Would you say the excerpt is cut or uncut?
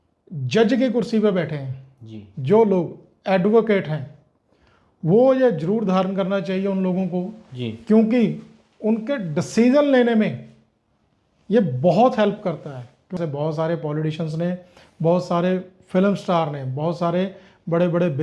cut